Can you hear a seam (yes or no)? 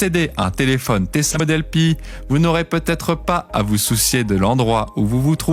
yes